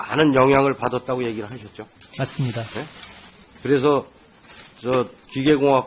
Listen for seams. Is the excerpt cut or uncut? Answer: uncut